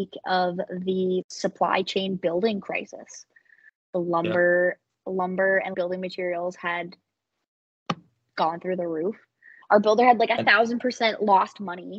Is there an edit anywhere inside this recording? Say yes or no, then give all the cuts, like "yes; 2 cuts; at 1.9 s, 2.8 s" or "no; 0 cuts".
no; 0 cuts